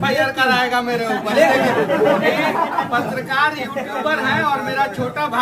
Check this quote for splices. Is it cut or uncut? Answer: uncut